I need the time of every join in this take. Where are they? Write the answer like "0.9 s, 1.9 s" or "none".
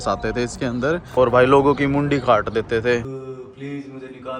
1.1 s, 3.1 s